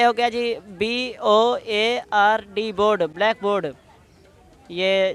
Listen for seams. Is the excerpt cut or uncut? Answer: uncut